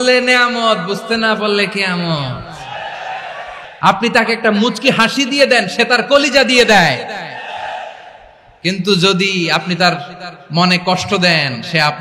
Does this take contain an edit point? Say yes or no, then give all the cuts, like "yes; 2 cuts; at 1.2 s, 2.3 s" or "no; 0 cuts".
yes; 1 cut; at 3.7 s